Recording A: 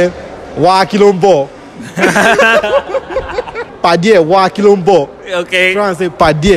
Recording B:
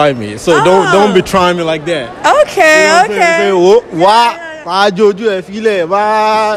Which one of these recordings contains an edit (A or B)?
A